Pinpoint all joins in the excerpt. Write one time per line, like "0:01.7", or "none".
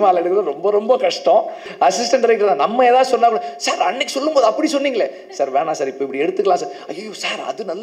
0:01.6